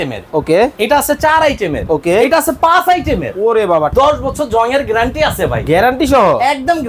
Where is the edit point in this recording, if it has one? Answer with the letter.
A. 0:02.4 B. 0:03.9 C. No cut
B